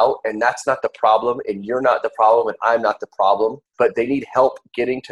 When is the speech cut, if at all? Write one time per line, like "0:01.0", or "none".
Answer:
0:03.6